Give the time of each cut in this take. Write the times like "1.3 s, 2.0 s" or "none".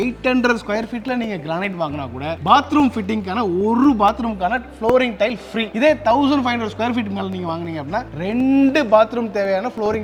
none